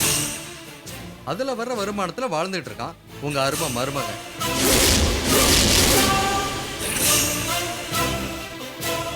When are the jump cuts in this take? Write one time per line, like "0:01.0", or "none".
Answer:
none